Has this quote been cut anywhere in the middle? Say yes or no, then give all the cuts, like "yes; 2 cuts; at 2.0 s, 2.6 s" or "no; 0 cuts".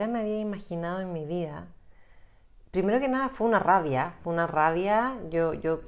no; 0 cuts